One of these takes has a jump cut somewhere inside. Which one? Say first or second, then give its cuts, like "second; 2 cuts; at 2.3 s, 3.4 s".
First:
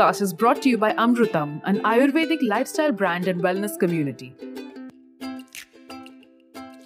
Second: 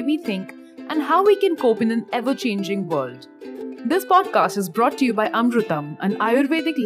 first; 1 cut; at 4.2 s